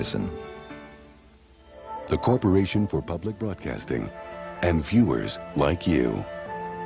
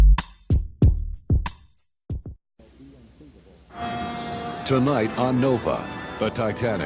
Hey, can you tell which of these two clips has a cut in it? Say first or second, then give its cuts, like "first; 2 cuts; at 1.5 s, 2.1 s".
second; 1 cut; at 1.1 s